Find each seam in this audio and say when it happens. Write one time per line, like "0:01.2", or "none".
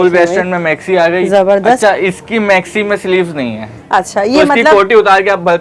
none

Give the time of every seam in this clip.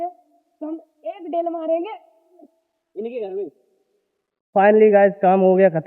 0:04.4

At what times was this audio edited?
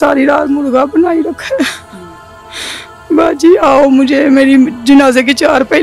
none

